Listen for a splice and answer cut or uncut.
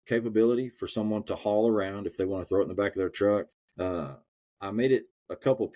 cut